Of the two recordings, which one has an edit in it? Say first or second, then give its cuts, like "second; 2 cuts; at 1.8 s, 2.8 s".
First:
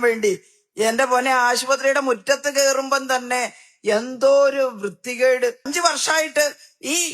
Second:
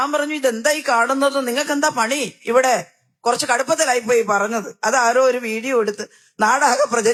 first; 1 cut; at 5.7 s